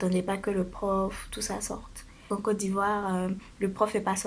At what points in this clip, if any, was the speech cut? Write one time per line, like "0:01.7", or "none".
0:02.2